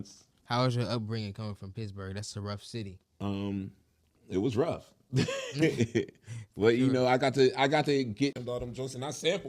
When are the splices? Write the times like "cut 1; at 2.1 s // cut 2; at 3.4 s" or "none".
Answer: cut 1; at 8.4 s